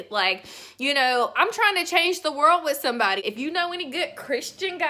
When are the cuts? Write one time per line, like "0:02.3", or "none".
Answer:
0:03.2